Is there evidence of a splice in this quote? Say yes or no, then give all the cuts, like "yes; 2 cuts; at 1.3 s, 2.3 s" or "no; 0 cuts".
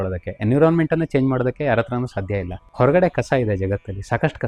no; 0 cuts